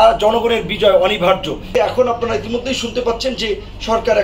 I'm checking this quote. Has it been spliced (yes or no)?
yes